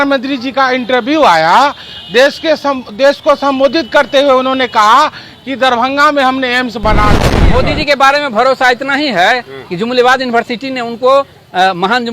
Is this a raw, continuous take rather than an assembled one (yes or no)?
no